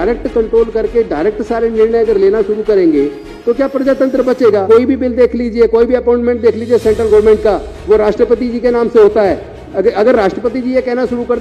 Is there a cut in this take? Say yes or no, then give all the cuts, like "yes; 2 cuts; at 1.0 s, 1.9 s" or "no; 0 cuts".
yes; 1 cut; at 4.6 s